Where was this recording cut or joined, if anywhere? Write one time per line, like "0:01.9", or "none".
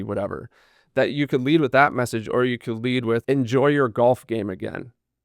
0:03.2